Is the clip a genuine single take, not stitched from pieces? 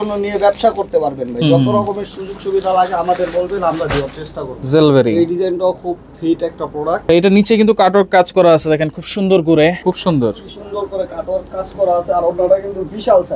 no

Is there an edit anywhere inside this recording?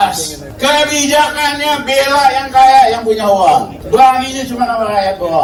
no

